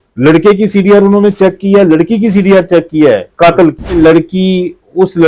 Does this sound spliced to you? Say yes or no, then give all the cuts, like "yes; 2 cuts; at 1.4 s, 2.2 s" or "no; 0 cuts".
yes; 1 cut; at 4.0 s